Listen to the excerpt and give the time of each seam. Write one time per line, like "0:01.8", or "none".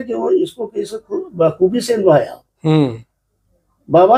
none